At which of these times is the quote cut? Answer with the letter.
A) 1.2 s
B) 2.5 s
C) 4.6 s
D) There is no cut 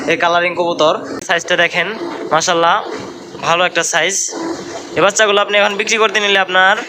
A